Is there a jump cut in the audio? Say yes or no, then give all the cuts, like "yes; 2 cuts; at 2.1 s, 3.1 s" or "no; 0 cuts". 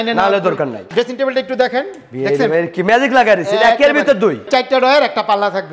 yes; 2 cuts; at 0.9 s, 4.4 s